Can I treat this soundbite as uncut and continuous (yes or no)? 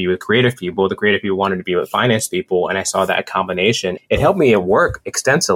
yes